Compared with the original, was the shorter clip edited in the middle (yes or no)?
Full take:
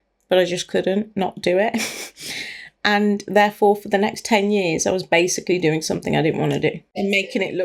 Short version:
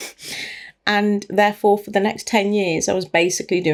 no